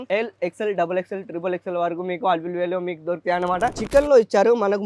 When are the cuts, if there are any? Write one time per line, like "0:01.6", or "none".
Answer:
0:03.8